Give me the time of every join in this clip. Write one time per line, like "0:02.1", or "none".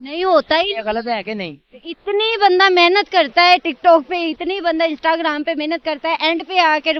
none